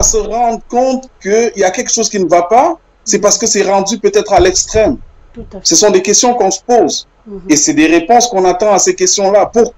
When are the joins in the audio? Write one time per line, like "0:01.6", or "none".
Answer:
none